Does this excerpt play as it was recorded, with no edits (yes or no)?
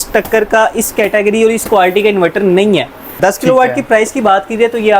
no